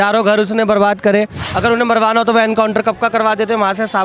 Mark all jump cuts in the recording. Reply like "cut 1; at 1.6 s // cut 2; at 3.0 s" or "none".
cut 1; at 1.4 s